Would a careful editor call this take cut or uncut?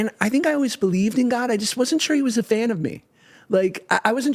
uncut